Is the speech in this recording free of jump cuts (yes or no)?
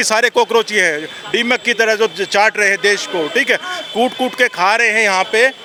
yes